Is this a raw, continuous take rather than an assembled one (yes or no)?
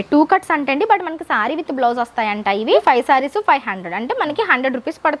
no